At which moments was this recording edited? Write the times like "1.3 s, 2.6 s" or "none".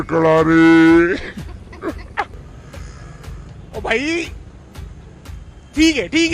2.4 s

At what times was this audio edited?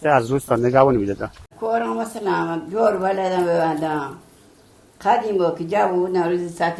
1.5 s

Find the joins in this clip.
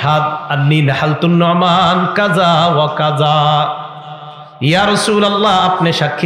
none

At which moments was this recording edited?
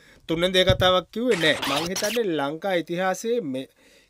1.7 s

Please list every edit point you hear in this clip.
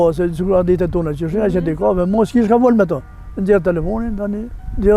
none

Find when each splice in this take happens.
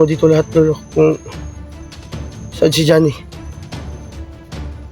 1.3 s, 2.5 s, 3.8 s

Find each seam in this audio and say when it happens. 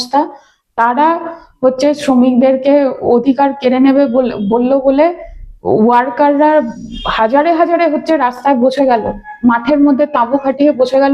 none

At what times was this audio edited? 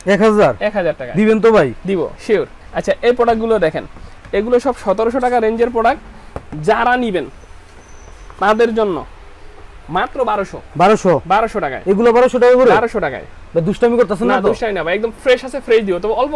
none

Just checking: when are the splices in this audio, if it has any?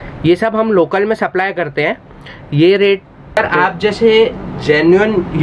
3.4 s

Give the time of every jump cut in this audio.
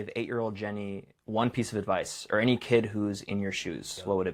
none

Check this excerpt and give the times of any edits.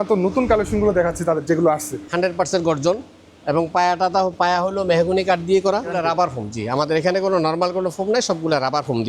2.0 s, 5.9 s

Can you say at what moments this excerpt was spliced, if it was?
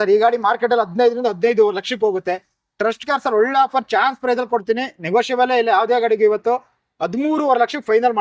none

